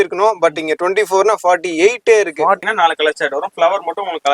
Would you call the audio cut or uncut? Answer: cut